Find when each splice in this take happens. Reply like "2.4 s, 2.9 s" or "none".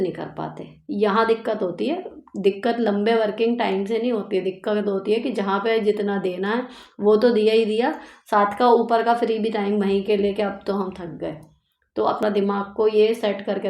12.2 s